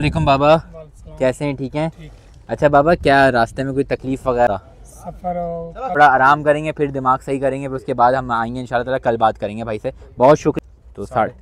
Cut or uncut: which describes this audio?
cut